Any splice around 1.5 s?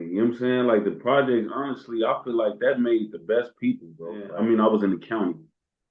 no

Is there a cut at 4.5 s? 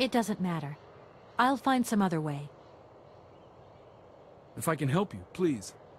yes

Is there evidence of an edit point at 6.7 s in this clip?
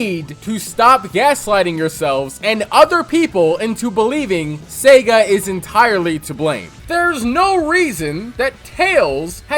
yes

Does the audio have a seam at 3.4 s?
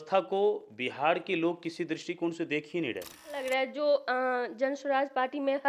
yes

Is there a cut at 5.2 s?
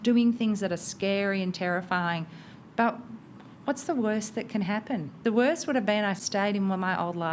yes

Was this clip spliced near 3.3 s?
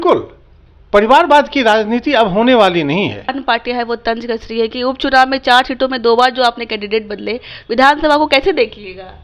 yes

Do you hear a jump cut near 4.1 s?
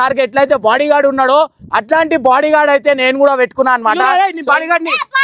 yes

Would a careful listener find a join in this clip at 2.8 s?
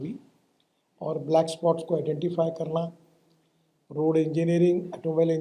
no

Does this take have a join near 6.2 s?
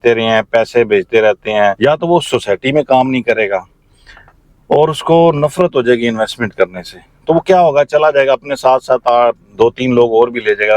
no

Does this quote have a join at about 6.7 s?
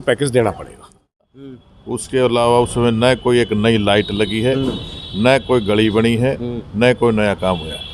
no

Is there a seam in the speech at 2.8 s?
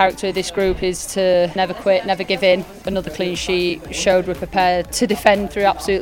yes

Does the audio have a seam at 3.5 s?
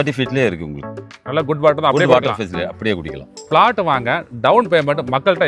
yes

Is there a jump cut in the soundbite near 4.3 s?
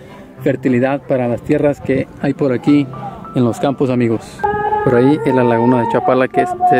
yes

